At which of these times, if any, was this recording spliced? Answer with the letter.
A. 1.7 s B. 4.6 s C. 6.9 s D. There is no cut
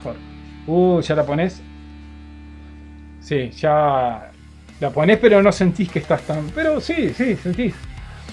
D